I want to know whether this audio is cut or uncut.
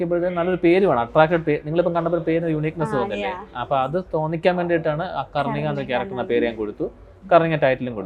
uncut